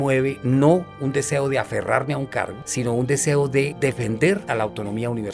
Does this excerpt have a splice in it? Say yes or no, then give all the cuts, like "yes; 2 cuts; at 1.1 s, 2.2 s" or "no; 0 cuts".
yes; 2 cuts; at 3.7 s, 4.4 s